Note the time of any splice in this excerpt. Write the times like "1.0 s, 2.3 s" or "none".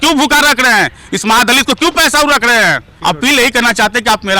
2.9 s